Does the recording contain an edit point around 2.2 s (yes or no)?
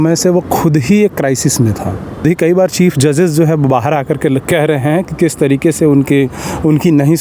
yes